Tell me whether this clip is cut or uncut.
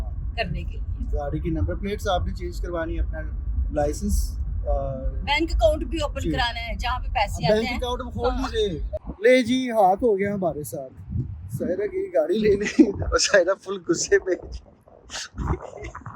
cut